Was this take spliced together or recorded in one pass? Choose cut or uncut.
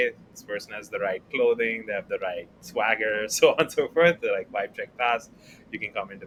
uncut